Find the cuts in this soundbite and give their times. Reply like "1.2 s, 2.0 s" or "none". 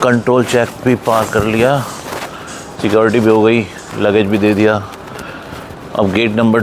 none